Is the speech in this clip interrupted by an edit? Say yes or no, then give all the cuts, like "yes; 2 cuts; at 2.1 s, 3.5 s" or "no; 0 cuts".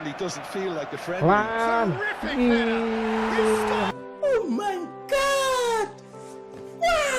no; 0 cuts